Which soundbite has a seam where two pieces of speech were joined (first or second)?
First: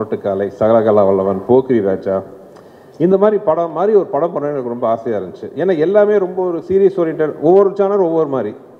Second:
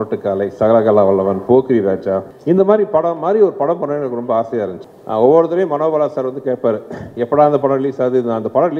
second